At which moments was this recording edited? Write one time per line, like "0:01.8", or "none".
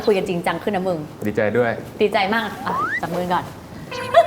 none